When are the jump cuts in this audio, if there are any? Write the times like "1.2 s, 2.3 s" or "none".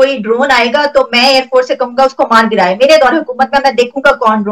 none